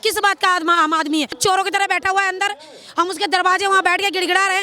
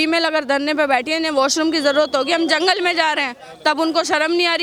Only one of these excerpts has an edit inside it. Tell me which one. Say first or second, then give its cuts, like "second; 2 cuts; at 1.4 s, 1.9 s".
first; 1 cut; at 1.3 s